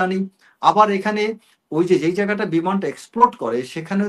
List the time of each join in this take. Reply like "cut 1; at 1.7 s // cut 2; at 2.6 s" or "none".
none